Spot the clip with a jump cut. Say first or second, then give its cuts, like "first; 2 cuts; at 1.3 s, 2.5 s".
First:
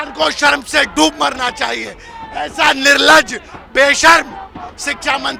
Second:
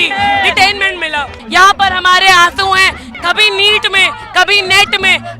second; 2 cuts; at 1.4 s, 3.1 s